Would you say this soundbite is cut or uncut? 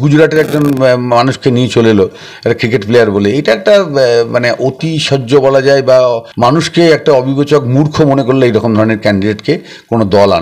cut